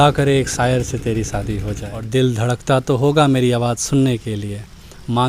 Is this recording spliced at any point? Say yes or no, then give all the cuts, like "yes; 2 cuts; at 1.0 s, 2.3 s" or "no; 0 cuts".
yes; 1 cut; at 1.9 s